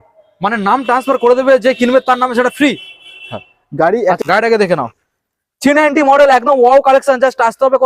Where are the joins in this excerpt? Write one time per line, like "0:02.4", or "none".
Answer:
0:04.2